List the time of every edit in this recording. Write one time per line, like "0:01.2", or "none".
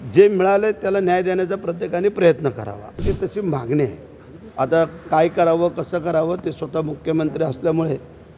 0:03.0